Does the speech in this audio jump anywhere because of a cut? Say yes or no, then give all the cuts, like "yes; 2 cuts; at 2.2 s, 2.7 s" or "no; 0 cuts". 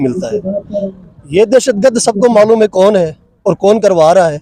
no; 0 cuts